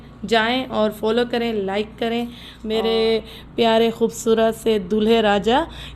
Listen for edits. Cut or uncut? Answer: cut